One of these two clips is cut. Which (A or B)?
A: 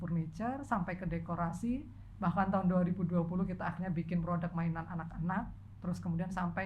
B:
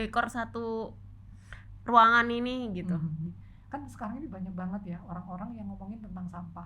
B